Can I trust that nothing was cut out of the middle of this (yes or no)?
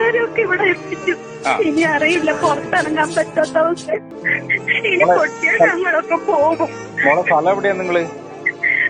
no